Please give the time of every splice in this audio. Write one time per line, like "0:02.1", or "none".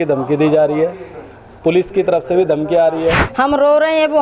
0:03.2